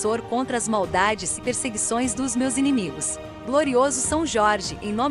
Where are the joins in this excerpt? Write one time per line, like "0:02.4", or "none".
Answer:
0:03.3